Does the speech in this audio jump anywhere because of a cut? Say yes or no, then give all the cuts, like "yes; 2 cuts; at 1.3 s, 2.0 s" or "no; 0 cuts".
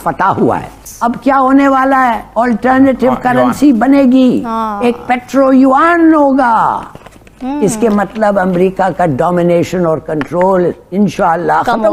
no; 0 cuts